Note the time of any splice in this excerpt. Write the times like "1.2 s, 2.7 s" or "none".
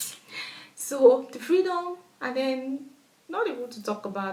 none